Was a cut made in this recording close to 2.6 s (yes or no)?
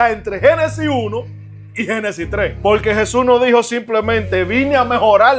yes